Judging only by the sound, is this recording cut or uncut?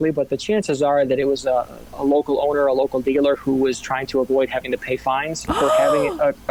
uncut